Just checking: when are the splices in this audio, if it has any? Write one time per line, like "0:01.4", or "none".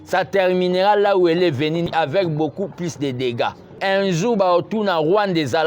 0:01.9
0:03.8

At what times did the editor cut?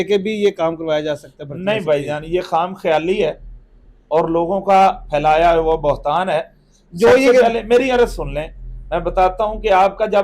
none

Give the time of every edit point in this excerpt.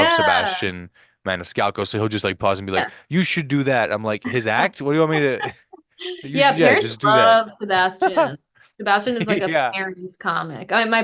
none

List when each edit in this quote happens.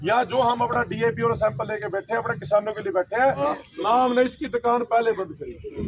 0:03.6

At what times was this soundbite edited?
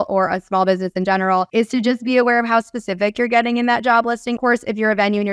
0:01.5
0:04.4

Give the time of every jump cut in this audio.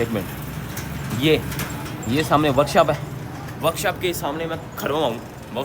none

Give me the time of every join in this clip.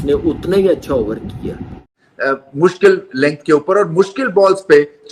0:01.8

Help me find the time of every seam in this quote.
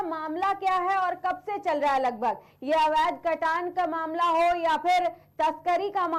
none

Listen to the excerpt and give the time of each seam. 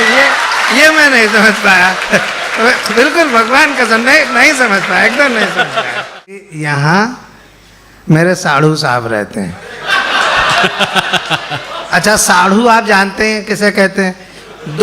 0:06.5

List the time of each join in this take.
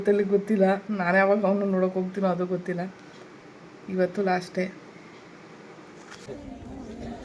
0:06.3

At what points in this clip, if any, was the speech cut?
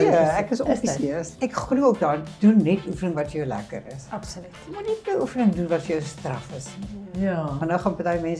0:01.3

